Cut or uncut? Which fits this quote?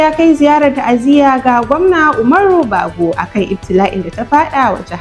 uncut